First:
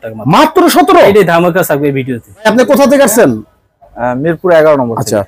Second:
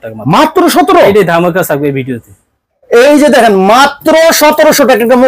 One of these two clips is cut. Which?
first; 1 cut; at 2.5 s

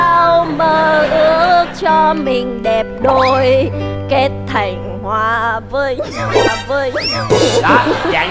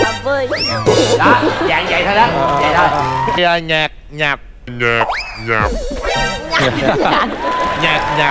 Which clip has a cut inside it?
second; 1 cut; at 3.4 s

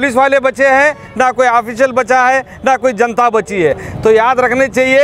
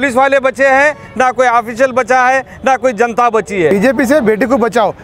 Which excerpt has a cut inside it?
second; 1 cut; at 3.7 s

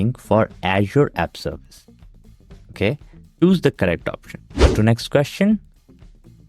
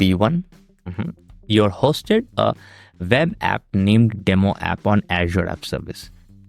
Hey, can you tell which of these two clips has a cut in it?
first; 1 cut; at 4.7 s

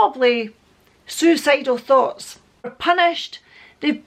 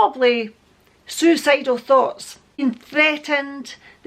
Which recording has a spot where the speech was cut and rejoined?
second; 1 cut; at 2.6 s

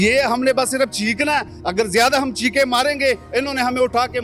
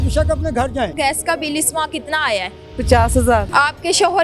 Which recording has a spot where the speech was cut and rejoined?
second; 2 cuts; at 0.9 s, 3.5 s

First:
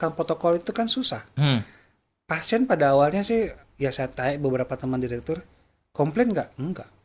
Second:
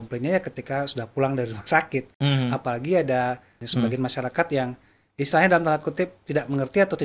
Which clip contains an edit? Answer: second; 1 cut; at 3.6 s

